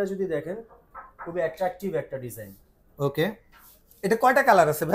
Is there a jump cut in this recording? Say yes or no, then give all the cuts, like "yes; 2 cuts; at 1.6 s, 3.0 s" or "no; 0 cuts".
no; 0 cuts